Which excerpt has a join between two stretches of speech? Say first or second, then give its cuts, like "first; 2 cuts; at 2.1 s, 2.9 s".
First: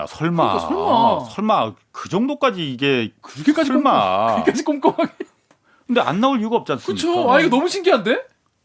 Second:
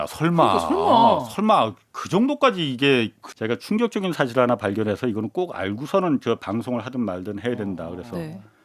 second; 1 cut; at 3.2 s